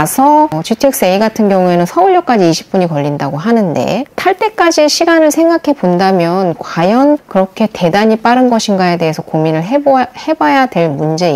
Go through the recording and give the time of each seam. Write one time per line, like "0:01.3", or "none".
none